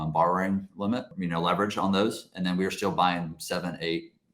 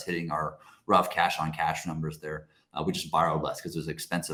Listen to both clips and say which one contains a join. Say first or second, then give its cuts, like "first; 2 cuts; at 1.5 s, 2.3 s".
first; 1 cut; at 1.1 s